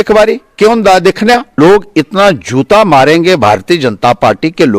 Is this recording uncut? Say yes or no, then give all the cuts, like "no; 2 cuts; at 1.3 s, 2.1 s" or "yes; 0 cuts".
no; 1 cut; at 1.6 s